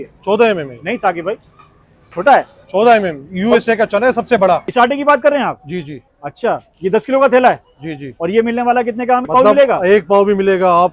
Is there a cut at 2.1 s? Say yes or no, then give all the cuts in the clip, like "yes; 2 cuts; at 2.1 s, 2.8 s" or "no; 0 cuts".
no; 2 cuts; at 4.7 s, 9.3 s